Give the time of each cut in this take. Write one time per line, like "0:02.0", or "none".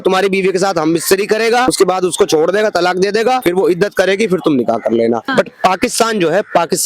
0:01.7
0:03.4
0:05.2